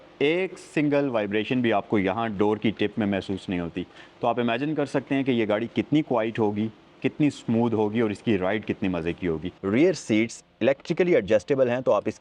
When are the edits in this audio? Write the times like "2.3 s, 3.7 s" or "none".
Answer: 9.5 s